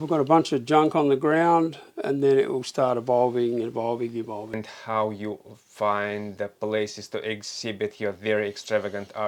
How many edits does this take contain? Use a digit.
1